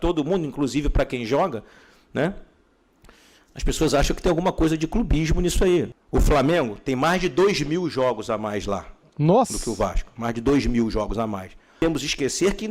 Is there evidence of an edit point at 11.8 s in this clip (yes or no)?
yes